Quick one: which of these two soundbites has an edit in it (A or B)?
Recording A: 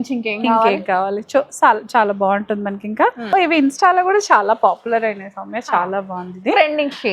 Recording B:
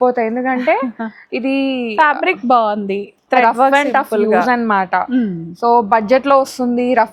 A